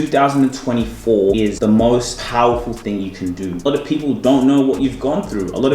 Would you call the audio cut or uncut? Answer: cut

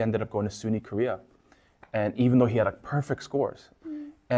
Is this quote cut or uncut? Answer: uncut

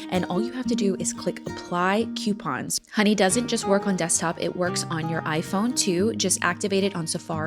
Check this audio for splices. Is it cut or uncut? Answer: cut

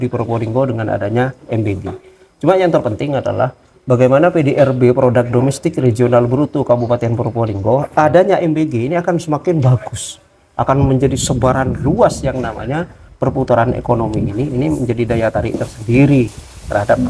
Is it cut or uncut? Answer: uncut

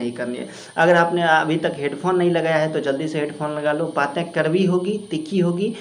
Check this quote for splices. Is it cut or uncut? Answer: uncut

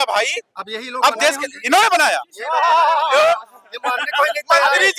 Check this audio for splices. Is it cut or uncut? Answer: uncut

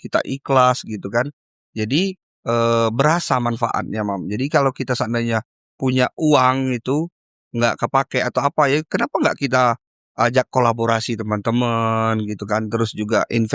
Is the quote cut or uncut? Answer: uncut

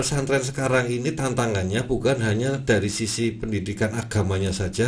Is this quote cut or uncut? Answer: uncut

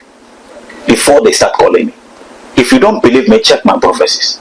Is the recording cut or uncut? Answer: cut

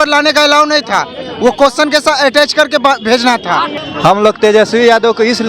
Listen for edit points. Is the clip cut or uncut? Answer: cut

